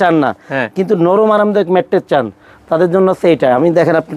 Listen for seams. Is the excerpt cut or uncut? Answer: uncut